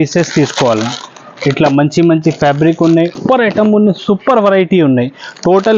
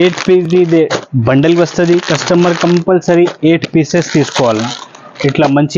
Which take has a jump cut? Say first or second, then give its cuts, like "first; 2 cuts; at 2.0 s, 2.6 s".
first; 1 cut; at 3.2 s